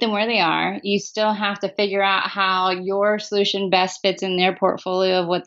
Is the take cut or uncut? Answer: uncut